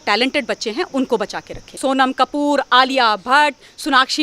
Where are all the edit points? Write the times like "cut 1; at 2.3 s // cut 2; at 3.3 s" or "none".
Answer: cut 1; at 1.8 s